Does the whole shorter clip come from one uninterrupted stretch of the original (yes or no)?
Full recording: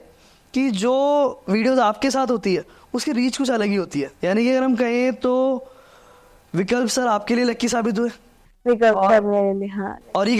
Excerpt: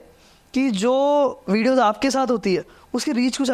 yes